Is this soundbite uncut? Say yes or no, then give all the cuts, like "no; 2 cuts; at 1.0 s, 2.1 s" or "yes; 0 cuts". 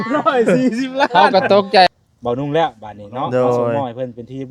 no; 1 cut; at 1.9 s